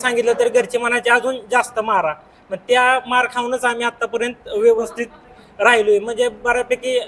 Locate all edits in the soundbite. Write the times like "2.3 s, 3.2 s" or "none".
none